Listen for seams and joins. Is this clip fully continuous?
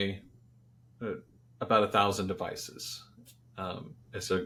yes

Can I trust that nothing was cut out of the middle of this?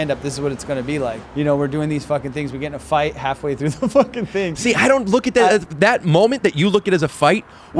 no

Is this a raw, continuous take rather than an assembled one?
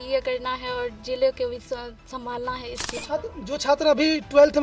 no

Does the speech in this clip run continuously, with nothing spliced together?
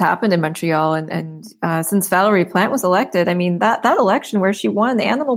yes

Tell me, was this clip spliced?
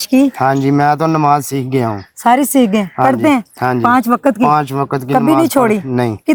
no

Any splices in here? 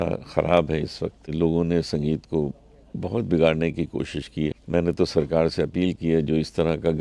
yes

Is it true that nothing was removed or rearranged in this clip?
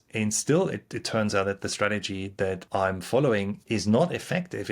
no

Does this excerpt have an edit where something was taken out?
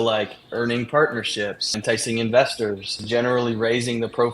yes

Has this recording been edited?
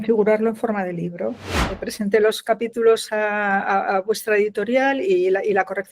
yes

